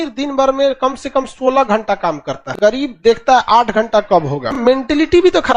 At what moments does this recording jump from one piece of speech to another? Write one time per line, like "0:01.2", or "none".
0:02.9
0:04.6